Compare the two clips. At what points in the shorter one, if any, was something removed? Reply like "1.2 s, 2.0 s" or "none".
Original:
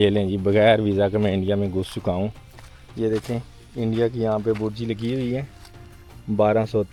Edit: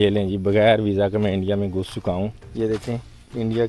2.4 s